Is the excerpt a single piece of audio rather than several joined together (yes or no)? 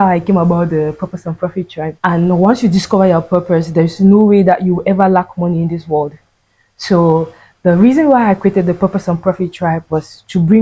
no